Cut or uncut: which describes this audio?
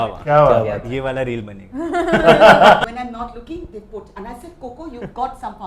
cut